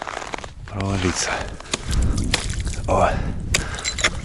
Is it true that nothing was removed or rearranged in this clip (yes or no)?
no